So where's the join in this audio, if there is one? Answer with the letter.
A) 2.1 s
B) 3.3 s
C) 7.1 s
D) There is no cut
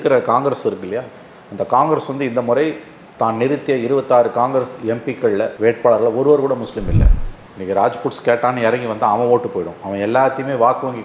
C